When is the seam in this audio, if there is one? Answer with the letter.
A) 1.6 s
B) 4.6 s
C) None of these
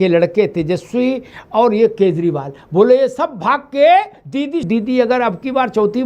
B